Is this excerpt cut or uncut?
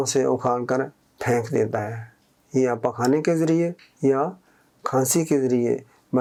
uncut